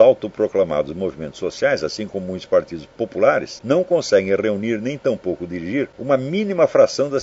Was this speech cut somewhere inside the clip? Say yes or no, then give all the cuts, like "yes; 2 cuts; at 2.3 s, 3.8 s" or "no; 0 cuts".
yes; 2 cuts; at 3.5 s, 6.0 s